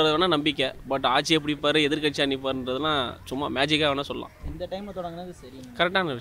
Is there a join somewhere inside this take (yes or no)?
no